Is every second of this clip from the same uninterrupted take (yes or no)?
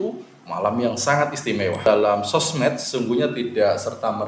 no